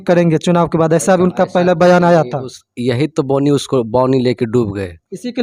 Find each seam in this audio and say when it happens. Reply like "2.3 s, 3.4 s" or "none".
none